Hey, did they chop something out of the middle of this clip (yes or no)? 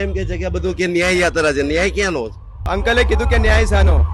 yes